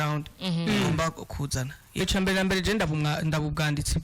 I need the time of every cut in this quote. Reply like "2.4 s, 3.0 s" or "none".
2.0 s